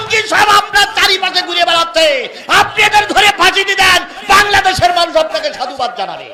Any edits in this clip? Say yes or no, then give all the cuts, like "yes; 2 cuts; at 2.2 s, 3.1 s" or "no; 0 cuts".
no; 0 cuts